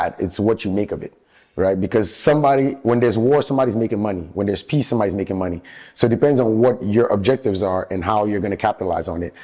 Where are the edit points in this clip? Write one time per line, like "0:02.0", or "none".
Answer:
none